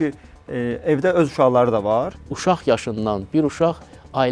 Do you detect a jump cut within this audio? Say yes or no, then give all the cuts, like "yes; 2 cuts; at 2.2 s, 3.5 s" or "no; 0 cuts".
yes; 1 cut; at 2.2 s